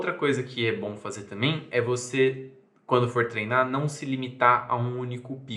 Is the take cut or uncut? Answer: uncut